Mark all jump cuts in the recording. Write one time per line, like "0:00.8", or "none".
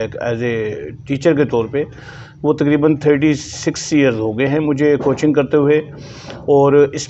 none